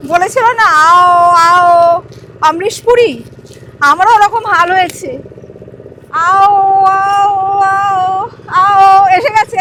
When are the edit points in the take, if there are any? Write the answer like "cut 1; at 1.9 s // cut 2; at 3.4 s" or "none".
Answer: none